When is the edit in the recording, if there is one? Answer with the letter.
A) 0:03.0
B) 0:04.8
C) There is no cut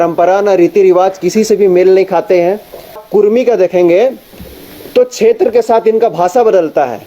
A